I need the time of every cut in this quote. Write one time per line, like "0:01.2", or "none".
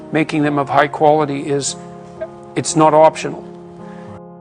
0:03.4